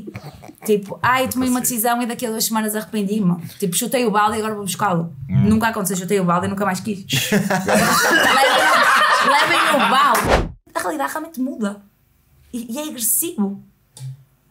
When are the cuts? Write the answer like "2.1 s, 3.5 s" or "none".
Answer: 10.5 s